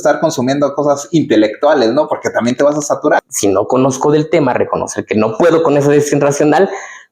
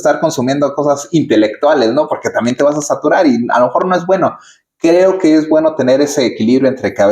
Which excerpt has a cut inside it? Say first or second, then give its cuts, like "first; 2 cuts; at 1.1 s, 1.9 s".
first; 1 cut; at 3.2 s